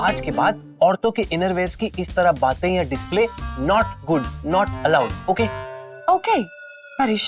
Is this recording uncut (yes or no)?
yes